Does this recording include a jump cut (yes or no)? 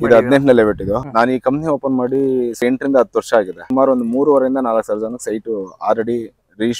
yes